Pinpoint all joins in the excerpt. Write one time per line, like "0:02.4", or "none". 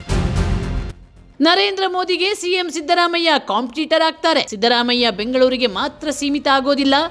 none